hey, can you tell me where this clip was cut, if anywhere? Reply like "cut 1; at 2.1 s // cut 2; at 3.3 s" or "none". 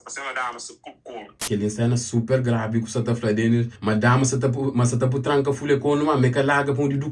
cut 1; at 1.4 s // cut 2; at 3.7 s